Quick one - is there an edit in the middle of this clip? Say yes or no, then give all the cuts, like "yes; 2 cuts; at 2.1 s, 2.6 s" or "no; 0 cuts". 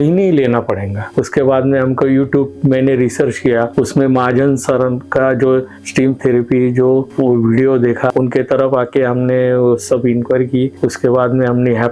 yes; 2 cuts; at 1.0 s, 8.1 s